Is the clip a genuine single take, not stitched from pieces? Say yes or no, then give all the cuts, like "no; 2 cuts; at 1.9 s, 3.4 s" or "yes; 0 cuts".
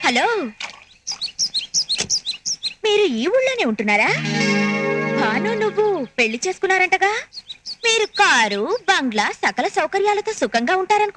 yes; 0 cuts